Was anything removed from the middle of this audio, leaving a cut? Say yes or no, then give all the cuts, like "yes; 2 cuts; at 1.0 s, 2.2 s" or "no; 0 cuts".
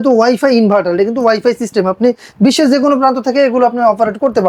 no; 0 cuts